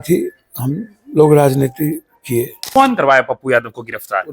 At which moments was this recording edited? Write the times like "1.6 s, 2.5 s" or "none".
2.6 s